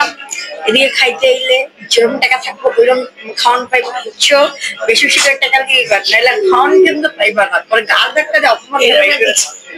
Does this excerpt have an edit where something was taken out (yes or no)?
no